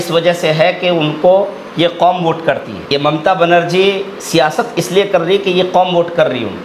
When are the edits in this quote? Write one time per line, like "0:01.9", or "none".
0:02.8